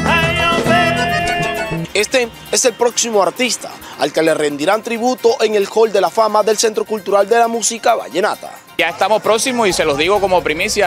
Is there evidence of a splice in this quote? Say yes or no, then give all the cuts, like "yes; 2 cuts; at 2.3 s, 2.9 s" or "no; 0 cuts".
yes; 2 cuts; at 1.8 s, 8.7 s